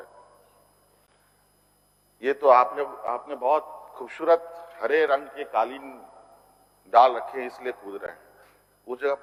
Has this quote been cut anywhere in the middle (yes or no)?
no